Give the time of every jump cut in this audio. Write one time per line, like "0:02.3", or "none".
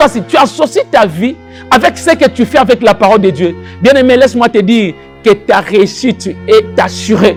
none